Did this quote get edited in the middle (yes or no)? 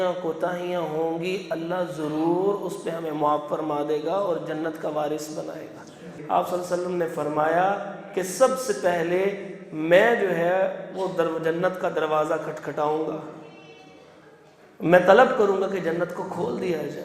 yes